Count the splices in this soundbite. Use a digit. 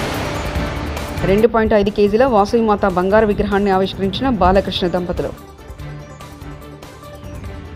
1